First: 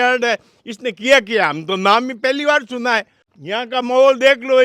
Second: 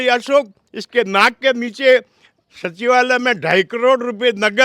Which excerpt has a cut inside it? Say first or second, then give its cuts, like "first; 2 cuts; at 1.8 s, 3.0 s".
first; 1 cut; at 3.3 s